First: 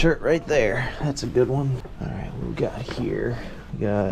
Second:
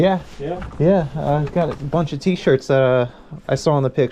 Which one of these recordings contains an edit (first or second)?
first